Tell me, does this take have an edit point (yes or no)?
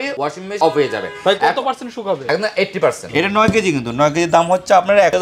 yes